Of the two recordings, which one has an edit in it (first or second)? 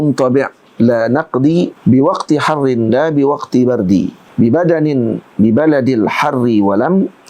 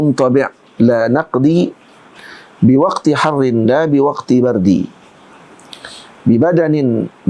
first